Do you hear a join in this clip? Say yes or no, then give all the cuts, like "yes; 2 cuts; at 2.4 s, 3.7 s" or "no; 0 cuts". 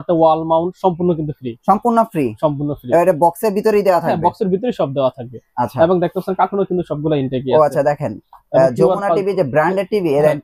no; 0 cuts